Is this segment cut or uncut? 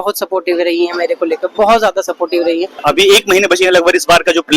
cut